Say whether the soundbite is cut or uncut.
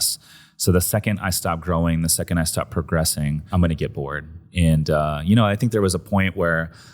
cut